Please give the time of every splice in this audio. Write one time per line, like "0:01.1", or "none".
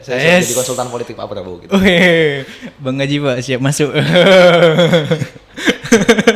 none